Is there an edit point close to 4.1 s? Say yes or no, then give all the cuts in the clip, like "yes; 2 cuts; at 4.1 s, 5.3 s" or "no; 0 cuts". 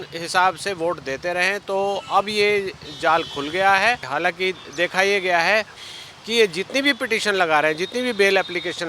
yes; 1 cut; at 4.1 s